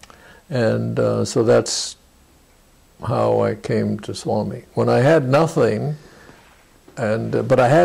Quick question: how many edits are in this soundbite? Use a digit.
0